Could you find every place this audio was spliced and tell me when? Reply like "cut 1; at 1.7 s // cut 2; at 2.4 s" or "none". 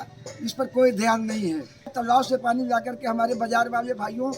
cut 1; at 1.9 s